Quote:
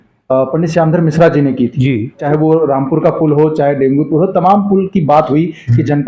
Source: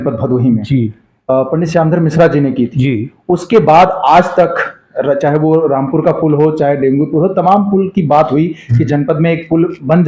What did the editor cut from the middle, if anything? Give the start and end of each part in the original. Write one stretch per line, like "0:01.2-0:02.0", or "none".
0:03.2-0:05.2